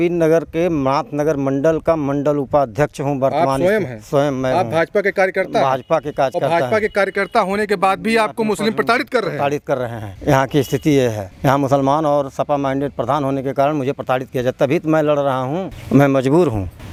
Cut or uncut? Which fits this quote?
uncut